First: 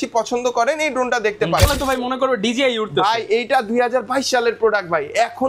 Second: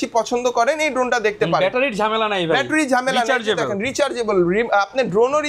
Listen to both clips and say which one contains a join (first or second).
first